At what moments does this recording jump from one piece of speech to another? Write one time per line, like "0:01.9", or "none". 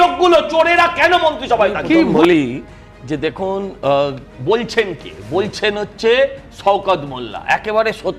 0:02.1